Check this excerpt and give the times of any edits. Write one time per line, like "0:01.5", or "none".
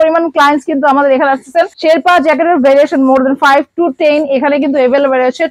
none